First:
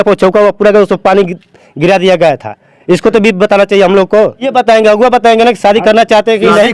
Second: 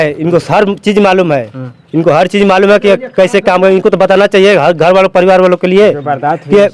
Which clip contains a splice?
first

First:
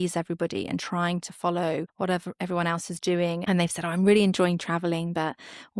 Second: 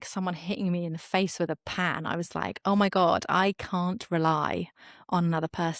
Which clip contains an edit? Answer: first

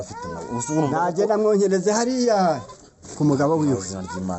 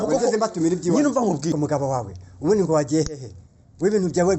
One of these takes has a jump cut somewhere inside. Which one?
second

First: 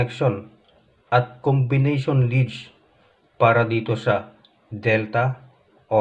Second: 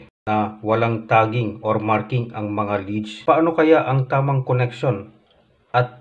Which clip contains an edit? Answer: second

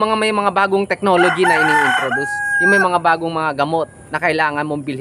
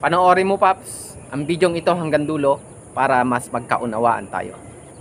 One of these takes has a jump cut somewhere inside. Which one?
first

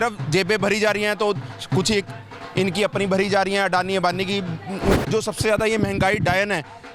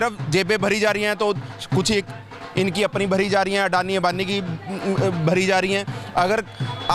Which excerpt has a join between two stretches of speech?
first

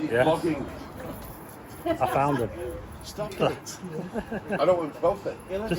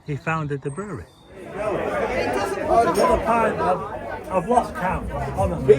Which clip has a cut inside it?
second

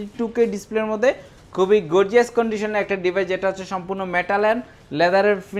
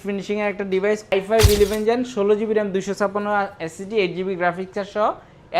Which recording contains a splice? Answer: second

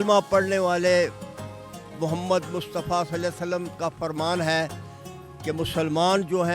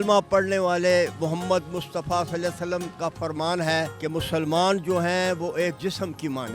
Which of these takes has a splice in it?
second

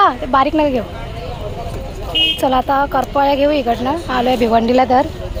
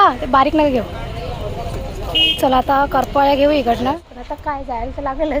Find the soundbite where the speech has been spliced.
second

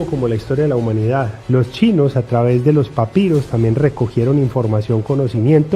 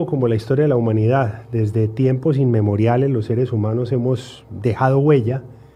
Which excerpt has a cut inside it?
first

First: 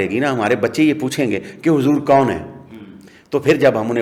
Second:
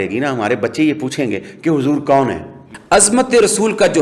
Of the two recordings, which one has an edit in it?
second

